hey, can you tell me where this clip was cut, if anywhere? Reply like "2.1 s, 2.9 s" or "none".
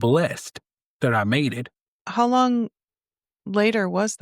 2.1 s